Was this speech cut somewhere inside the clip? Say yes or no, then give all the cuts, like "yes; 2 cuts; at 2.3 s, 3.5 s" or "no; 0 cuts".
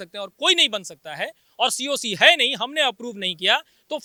no; 0 cuts